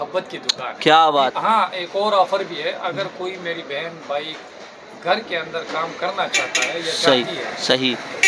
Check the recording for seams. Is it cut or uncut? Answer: cut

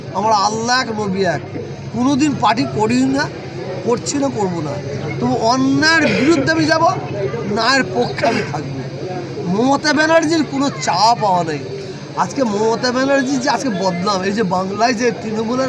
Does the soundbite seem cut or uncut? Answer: uncut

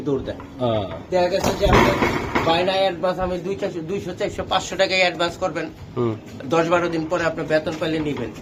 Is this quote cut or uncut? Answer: uncut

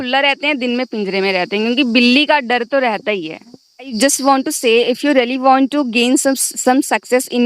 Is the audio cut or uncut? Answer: cut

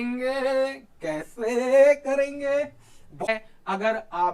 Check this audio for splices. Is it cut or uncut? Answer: cut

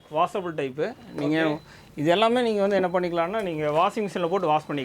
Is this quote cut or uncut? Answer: uncut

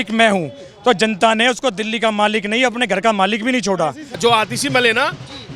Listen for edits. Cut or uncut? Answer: cut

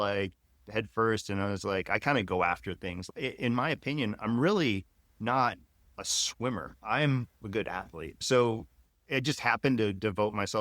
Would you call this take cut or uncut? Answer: cut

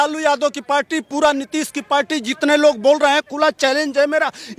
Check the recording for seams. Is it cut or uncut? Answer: uncut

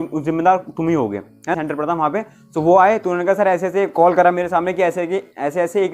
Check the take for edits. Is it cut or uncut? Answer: cut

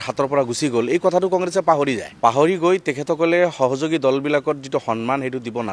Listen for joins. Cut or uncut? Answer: cut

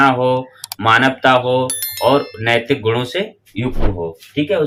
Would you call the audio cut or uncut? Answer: uncut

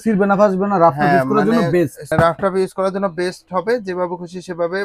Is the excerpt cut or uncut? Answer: cut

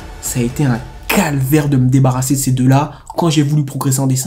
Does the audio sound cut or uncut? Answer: uncut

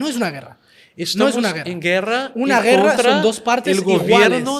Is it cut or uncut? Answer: uncut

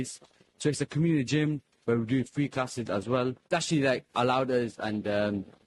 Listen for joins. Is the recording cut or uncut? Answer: cut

